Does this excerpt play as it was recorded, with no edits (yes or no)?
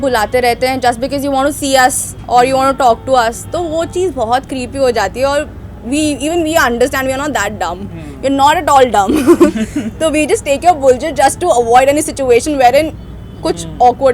yes